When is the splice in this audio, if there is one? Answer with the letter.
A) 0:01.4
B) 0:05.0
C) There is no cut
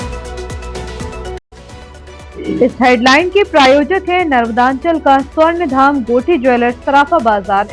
A